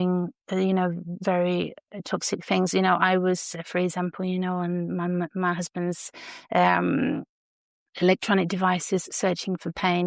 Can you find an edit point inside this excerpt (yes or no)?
no